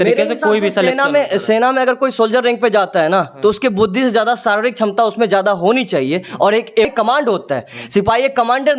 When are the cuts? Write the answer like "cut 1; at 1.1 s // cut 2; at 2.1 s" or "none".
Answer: cut 1; at 6.9 s